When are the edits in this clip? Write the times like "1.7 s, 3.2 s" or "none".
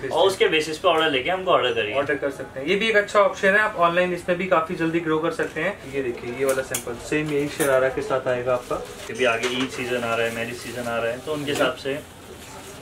5.8 s, 9.0 s

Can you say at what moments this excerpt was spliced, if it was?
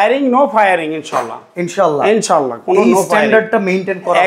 none

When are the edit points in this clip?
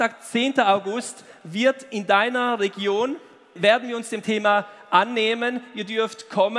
3.5 s

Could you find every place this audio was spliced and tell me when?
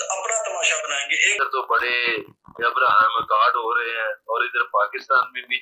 1.4 s

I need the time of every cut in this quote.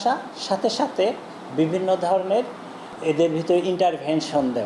2.9 s

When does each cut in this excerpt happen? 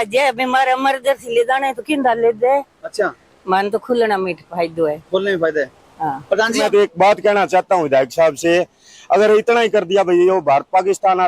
6.6 s

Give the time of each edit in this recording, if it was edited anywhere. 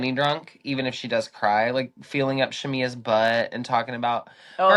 none

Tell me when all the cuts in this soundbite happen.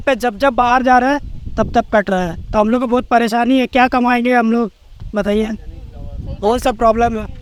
none

